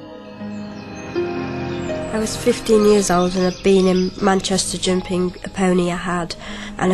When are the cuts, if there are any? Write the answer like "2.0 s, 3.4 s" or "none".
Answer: 3.0 s